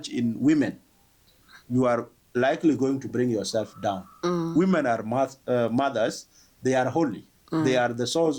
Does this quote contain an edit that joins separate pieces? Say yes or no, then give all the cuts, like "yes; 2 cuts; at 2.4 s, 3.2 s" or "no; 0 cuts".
no; 0 cuts